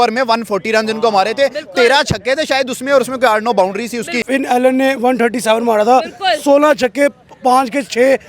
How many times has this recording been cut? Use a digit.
1